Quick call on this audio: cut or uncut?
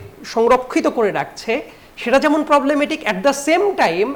uncut